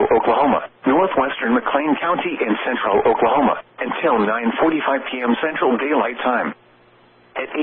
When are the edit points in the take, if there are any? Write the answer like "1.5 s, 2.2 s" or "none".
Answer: 1.3 s